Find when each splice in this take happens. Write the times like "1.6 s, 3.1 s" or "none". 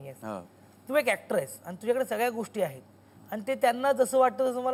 none